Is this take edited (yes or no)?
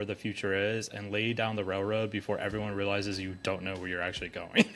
no